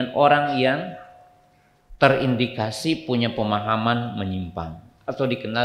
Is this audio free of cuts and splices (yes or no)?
yes